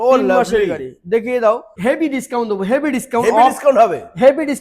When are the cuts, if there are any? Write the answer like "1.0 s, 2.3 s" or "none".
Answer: 1.7 s

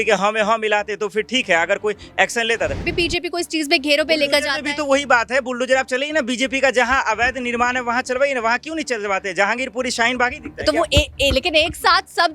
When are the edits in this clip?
2.9 s

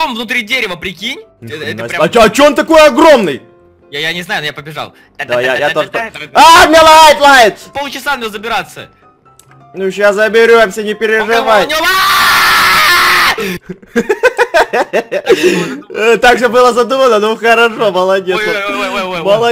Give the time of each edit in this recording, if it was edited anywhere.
1.3 s, 7.7 s

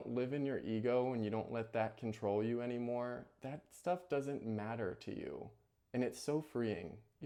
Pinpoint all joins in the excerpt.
none

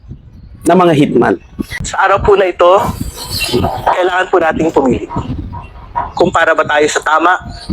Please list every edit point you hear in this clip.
1.9 s

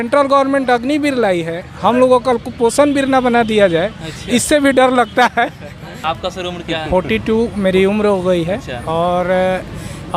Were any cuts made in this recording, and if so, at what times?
6.0 s

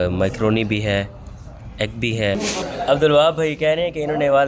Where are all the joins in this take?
2.4 s

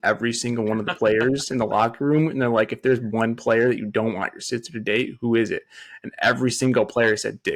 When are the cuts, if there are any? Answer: none

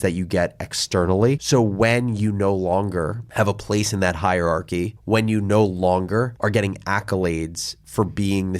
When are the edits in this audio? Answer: 1.4 s

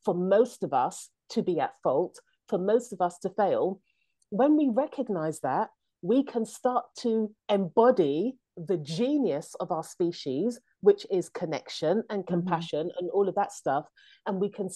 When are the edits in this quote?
7.4 s

